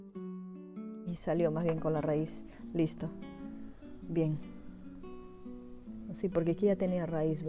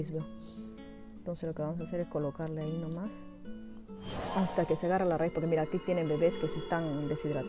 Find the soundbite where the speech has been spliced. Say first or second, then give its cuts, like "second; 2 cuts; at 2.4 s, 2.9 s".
first; 1 cut; at 1.1 s